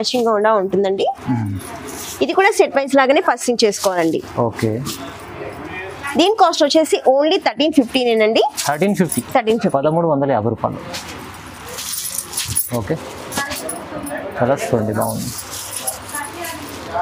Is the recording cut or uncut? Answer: uncut